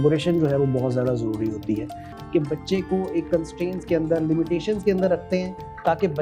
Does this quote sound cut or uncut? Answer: cut